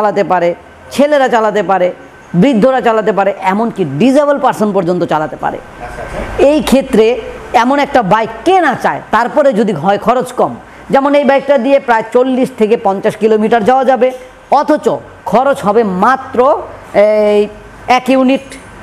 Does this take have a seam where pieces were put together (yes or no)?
no